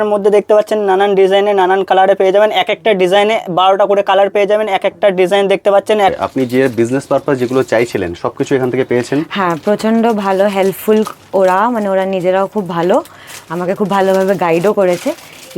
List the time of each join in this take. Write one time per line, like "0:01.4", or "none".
0:06.1